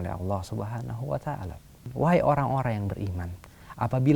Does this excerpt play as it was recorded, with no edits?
no; 1 cut; at 1.9 s

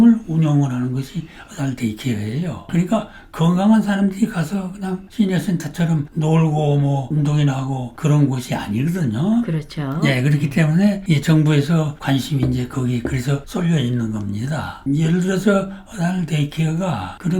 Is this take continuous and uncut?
yes; 0 cuts

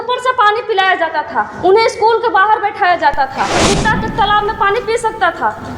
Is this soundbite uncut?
no; 1 cut; at 3.6 s

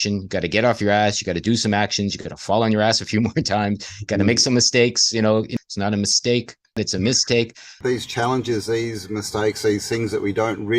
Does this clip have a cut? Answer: yes; 3 cuts; at 5.5 s, 6.8 s, 7.7 s

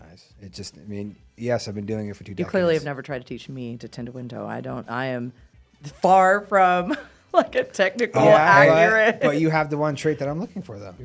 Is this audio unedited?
yes; 0 cuts

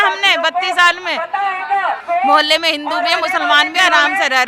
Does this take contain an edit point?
yes; 1 cut; at 2.0 s

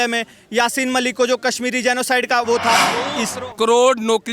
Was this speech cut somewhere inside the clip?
yes; 1 cut; at 2.9 s

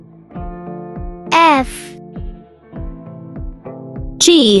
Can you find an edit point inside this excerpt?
yes; 2 cuts; at 1.7 s, 3.5 s

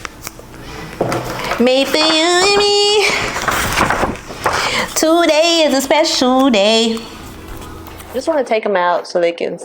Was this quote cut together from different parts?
yes; 1 cut; at 7.9 s

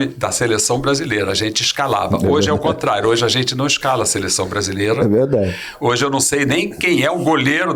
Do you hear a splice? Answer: no; 0 cuts

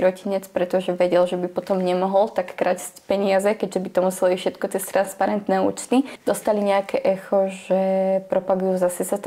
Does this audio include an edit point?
yes; 1 cut; at 6.1 s

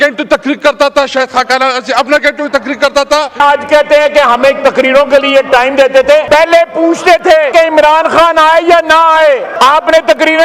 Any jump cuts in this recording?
yes; 4 cuts; at 3.4 s, 6.2 s, 7.5 s, 9.5 s

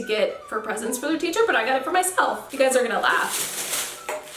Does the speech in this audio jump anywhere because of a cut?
yes; 1 cut; at 2.4 s

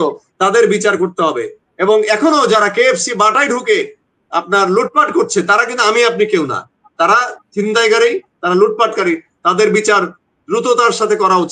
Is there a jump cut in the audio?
no; 0 cuts

